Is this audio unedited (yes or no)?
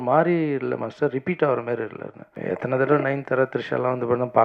no